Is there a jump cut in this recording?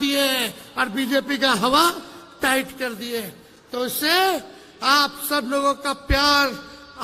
no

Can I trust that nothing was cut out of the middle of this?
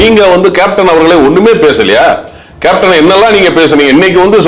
yes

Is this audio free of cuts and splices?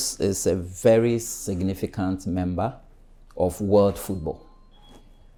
yes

